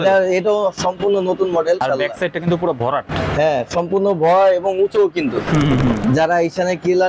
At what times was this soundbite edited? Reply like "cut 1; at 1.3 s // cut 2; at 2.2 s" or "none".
cut 1; at 1.8 s // cut 2; at 6.0 s